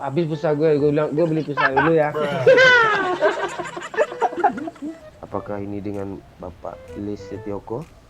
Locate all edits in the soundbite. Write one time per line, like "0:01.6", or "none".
0:04.9